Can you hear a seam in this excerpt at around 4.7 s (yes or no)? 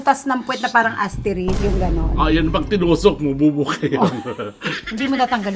yes